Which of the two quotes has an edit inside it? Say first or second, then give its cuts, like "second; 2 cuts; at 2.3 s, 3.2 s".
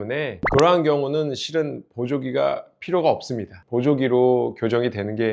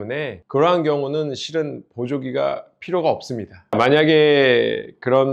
second; 1 cut; at 3.7 s